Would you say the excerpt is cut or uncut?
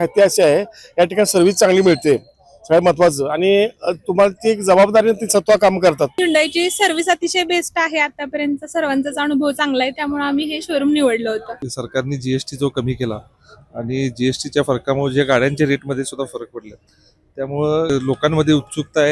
cut